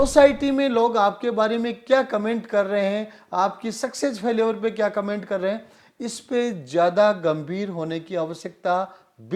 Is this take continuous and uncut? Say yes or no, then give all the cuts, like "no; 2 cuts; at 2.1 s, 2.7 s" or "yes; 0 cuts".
yes; 0 cuts